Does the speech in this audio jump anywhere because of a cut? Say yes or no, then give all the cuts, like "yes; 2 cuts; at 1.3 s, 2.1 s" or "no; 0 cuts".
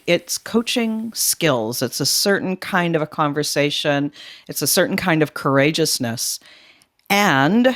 no; 0 cuts